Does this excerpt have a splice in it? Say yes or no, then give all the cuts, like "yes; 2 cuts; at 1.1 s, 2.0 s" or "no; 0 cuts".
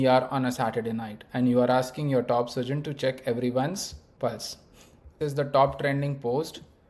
yes; 1 cut; at 5.2 s